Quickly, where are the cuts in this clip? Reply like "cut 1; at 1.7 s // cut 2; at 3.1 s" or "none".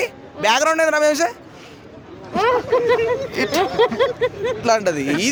none

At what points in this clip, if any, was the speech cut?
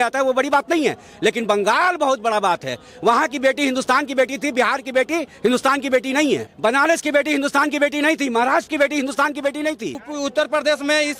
cut 1; at 6.5 s // cut 2; at 10.1 s

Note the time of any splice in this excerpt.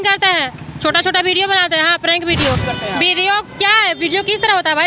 cut 1; at 2.6 s

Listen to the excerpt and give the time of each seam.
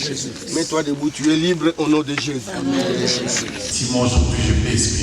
cut 1; at 3.7 s

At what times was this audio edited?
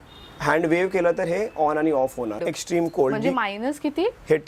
cut 1; at 2.4 s

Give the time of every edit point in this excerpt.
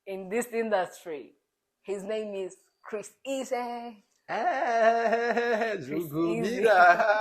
none

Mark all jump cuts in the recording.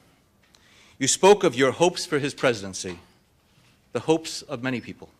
cut 1; at 2.5 s

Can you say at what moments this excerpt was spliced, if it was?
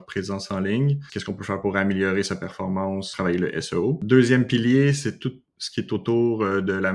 cut 1; at 1.1 s // cut 2; at 3.1 s // cut 3; at 4.0 s

